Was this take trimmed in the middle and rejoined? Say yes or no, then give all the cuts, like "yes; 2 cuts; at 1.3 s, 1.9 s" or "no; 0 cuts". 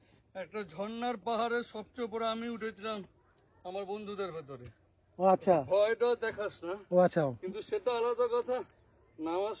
no; 0 cuts